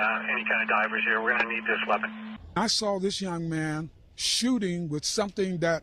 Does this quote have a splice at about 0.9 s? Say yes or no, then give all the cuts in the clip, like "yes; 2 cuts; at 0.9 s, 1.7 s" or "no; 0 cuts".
no; 1 cut; at 2.3 s